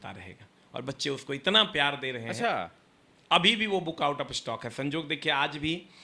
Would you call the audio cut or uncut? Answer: uncut